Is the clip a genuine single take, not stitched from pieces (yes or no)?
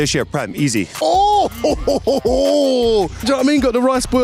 no